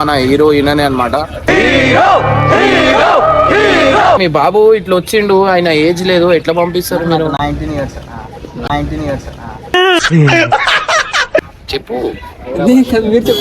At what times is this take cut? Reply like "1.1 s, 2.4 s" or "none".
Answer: 4.2 s, 11.6 s